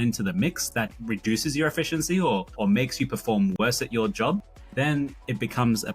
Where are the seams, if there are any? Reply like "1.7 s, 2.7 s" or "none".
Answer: none